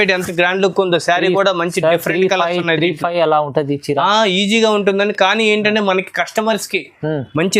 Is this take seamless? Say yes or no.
yes